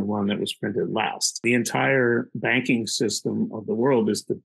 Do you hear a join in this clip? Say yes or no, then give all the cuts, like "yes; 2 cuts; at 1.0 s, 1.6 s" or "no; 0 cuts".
yes; 1 cut; at 1.4 s